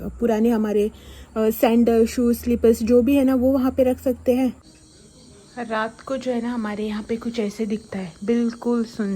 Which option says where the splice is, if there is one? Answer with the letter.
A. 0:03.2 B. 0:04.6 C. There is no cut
B